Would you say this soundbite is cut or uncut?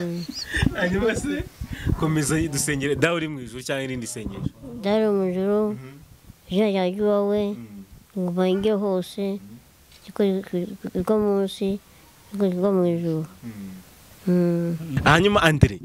cut